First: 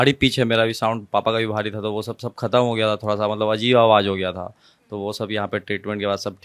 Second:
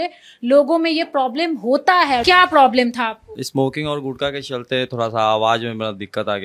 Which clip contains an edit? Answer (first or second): second